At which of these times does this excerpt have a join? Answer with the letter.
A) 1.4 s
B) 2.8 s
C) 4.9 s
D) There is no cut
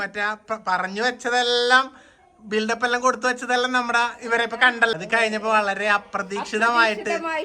C